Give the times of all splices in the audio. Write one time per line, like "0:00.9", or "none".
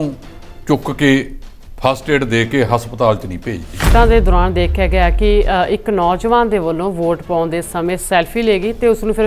0:03.9